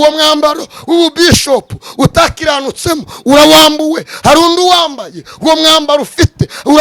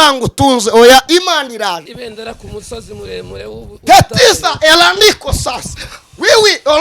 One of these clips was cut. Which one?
second; 1 cut; at 1.9 s

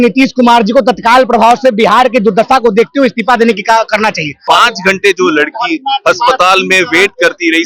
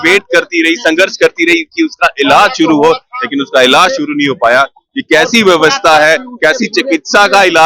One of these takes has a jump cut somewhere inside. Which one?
first; 1 cut; at 4.4 s

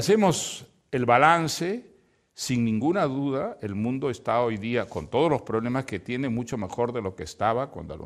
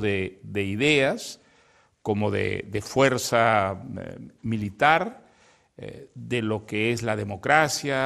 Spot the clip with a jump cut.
first; 1 cut; at 3.4 s

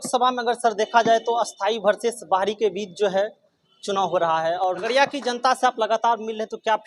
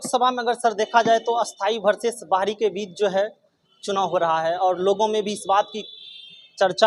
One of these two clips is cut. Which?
first; 1 cut; at 4.8 s

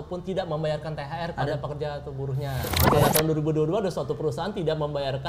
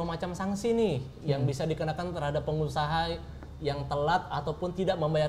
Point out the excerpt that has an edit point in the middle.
first; 1 cut; at 2.8 s

